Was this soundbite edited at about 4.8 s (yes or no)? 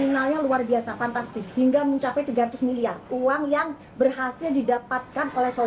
no